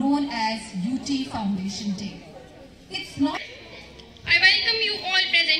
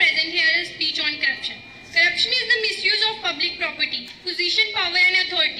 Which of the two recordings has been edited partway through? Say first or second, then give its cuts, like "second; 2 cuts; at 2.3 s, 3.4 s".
first; 1 cut; at 3.4 s